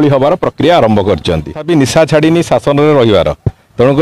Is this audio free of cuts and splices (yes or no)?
no